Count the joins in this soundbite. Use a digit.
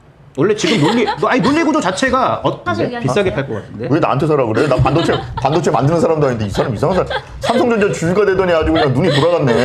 1